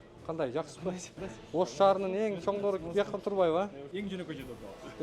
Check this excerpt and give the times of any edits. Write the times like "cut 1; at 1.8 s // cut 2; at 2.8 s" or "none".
cut 1; at 1.1 s // cut 2; at 3.8 s